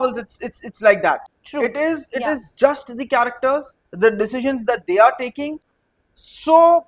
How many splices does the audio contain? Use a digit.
2